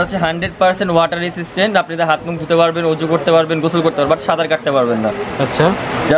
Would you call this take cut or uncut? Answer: uncut